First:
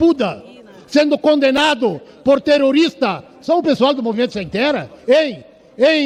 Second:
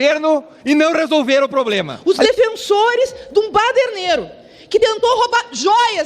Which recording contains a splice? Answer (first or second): second